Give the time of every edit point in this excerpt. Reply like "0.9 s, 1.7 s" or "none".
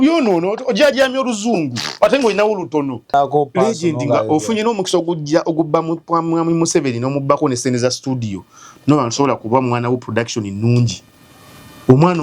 3.1 s